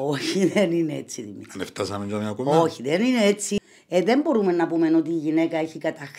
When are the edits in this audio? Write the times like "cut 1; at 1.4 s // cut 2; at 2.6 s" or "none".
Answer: cut 1; at 3.5 s